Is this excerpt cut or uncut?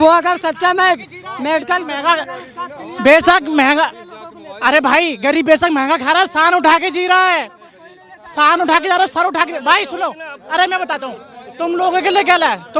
uncut